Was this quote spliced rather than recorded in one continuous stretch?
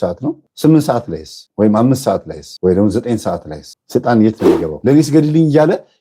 yes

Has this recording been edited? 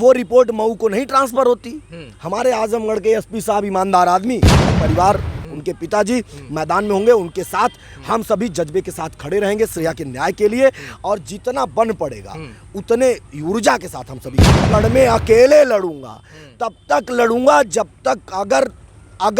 yes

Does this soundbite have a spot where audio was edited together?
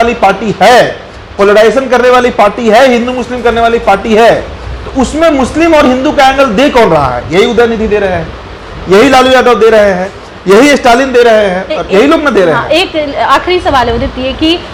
no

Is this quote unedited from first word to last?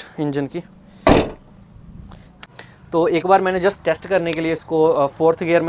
no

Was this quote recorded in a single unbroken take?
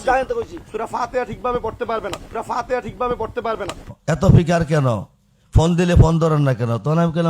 no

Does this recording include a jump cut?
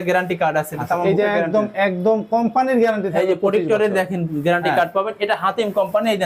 no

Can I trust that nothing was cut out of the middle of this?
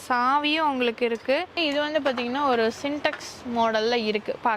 no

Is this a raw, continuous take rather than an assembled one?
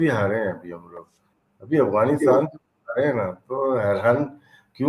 yes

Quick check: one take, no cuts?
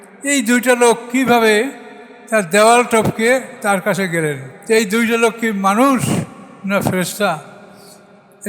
no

